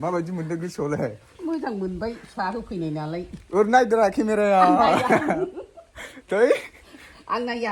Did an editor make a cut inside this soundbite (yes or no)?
no